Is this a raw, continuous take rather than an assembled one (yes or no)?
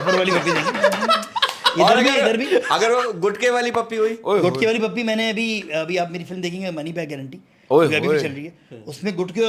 yes